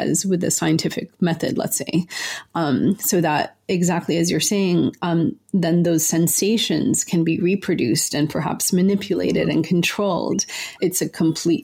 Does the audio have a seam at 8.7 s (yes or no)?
no